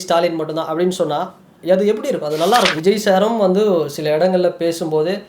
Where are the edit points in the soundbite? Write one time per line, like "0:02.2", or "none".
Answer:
0:02.8